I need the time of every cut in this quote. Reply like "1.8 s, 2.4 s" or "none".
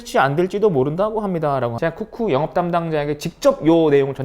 1.7 s